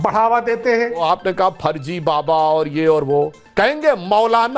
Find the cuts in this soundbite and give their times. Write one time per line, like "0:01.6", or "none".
0:01.0
0:03.4